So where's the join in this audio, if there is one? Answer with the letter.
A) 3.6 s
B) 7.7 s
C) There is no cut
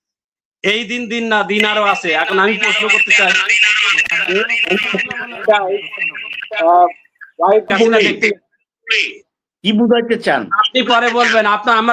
B